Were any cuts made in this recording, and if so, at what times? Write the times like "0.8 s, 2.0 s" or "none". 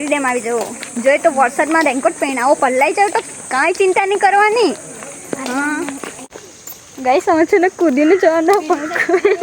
6.2 s

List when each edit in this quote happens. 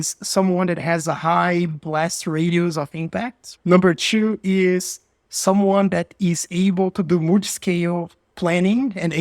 3.4 s

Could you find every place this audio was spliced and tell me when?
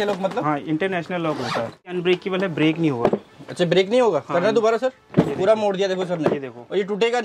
1.9 s

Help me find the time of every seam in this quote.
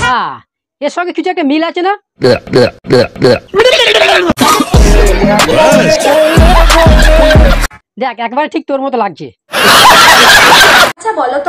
9.6 s

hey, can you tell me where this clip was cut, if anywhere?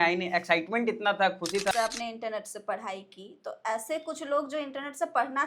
1.7 s

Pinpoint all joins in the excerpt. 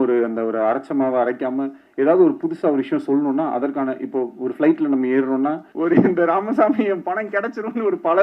5.7 s

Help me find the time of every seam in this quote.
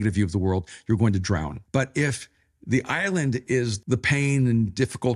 1.6 s, 3.8 s

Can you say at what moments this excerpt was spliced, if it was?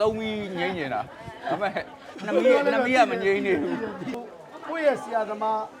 4.2 s

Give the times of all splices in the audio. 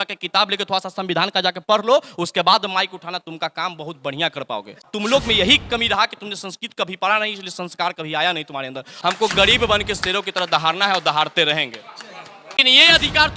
4.9 s, 8.9 s, 12.6 s

